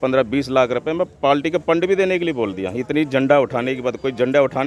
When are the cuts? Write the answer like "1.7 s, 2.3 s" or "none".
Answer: none

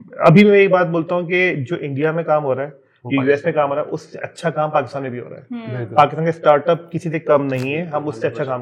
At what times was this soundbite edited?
none

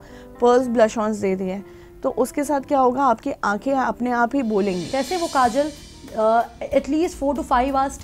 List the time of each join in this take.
4.8 s

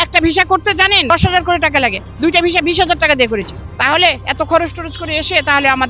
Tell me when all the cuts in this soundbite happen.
1.1 s, 3.6 s

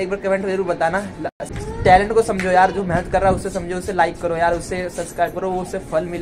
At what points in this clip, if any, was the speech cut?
1.2 s

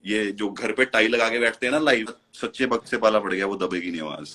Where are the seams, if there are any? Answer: 2.2 s

